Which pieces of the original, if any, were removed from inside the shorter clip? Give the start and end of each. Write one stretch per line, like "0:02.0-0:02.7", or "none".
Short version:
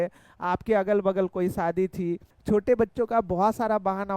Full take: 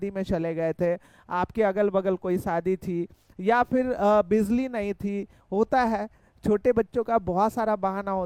0:03.2-0:06.3